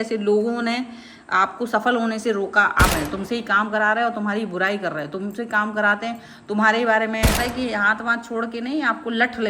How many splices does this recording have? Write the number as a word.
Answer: two